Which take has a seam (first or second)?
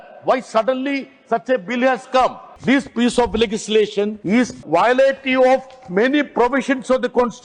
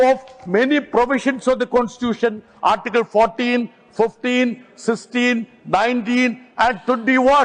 first